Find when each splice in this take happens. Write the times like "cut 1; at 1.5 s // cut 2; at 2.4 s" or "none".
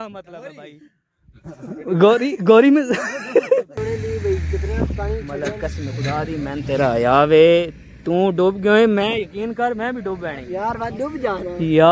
cut 1; at 3.8 s